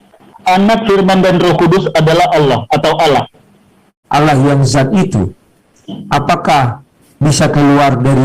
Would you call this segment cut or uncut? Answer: cut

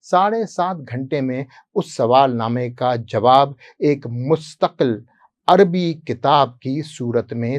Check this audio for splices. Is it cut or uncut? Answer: uncut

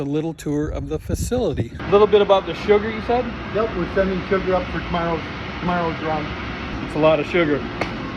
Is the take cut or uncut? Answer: cut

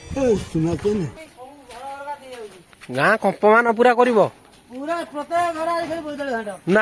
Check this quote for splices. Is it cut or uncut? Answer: cut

